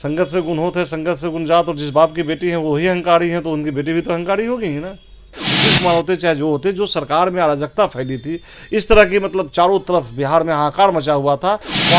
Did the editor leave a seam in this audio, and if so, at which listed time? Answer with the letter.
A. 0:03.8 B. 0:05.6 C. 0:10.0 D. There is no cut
B